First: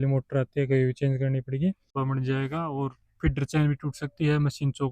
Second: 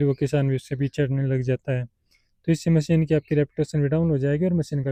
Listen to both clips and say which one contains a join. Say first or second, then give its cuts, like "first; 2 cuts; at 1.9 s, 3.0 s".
first; 1 cut; at 1.9 s